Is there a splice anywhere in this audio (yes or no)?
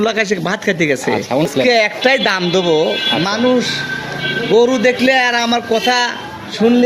yes